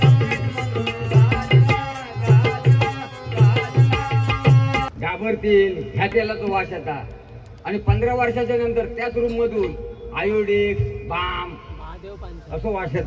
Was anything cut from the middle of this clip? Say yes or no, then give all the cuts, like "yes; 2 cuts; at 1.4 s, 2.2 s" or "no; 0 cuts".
yes; 1 cut; at 4.9 s